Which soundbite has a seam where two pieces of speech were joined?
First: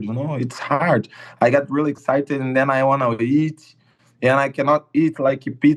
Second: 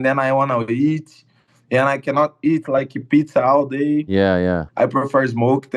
second; 1 cut; at 4.7 s

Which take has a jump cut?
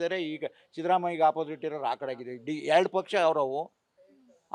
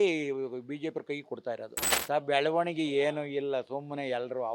second; 1 cut; at 1.9 s

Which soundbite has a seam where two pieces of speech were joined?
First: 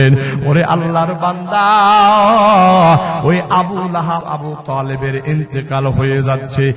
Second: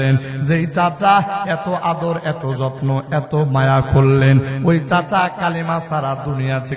first; 1 cut; at 4.2 s

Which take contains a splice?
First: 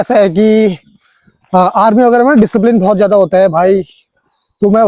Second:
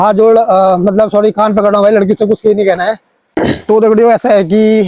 second; 1 cut; at 3.2 s

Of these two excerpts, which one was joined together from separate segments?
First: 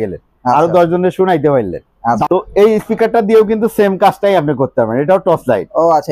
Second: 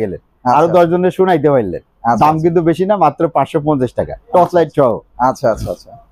first; 1 cut; at 2.2 s

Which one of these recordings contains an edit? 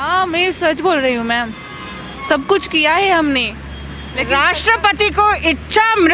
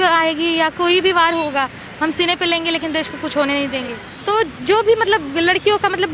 second; 1 cut; at 4.1 s

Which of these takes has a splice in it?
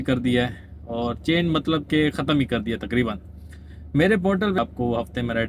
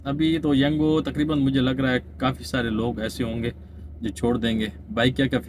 first; 1 cut; at 4.6 s

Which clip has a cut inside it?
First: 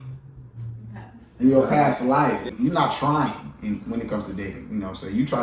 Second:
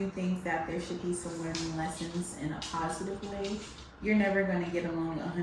first; 1 cut; at 2.5 s

